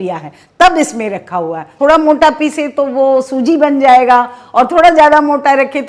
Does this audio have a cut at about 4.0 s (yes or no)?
no